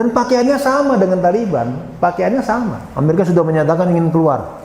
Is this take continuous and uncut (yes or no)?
no